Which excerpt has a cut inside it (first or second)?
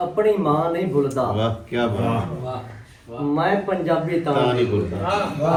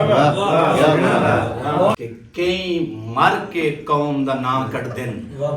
second